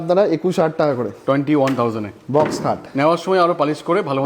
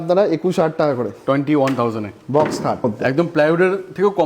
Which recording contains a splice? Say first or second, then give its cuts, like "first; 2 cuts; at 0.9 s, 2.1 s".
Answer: second; 1 cut; at 2.8 s